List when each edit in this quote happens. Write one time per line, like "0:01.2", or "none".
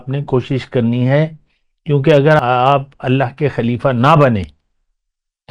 0:02.4